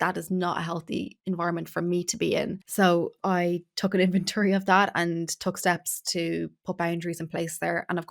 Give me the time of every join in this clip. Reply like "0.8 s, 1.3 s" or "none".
3.1 s